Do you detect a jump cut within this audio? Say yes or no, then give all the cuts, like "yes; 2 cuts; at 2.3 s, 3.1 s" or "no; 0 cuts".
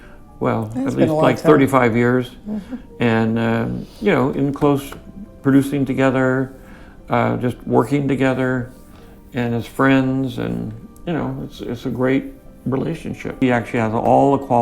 yes; 1 cut; at 13.3 s